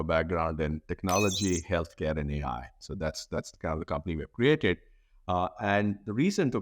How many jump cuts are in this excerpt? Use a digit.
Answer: 0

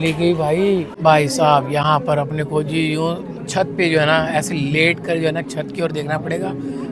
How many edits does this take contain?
1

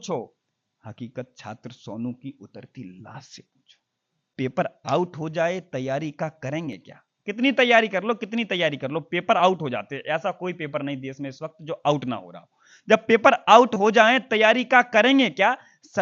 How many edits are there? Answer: 1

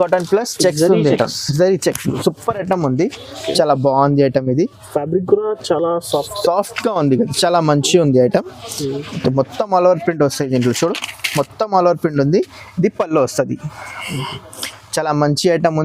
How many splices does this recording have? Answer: 0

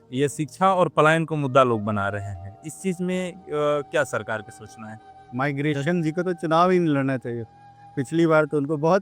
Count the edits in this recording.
1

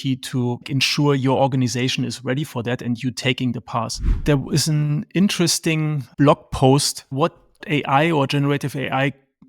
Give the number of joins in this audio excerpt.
2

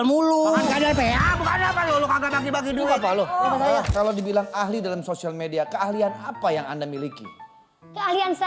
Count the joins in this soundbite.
1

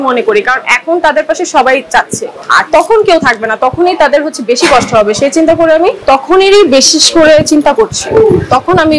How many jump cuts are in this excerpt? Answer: 1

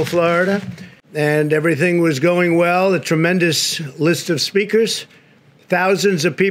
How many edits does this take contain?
1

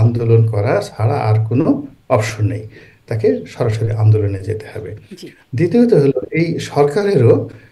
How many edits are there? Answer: 0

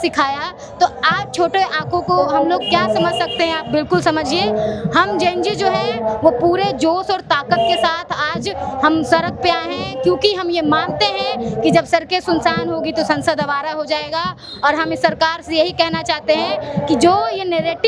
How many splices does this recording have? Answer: 0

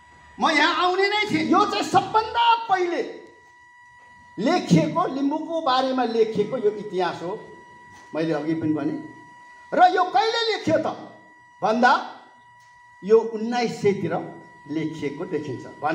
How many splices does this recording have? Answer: 1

